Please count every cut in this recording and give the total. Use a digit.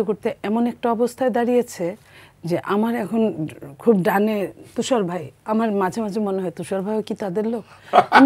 0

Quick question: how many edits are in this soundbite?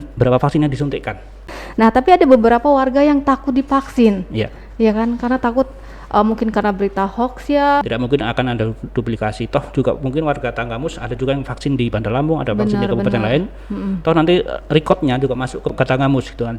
3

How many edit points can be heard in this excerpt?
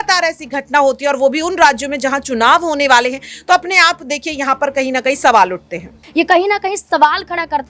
1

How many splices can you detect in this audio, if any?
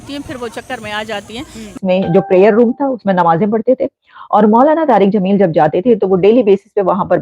1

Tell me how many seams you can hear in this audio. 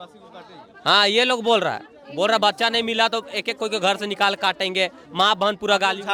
0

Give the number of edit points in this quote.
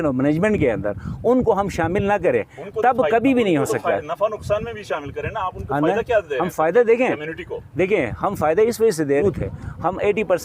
1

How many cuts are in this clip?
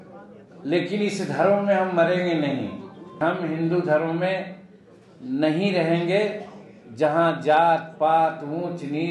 1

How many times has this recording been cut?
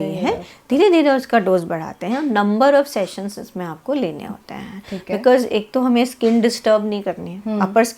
0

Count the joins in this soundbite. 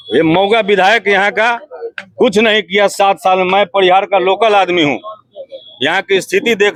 0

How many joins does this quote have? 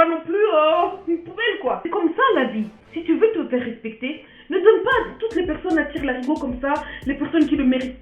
1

